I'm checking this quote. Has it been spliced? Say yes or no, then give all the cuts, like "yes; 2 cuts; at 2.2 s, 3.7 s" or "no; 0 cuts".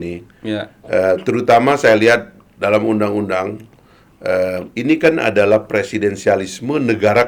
no; 0 cuts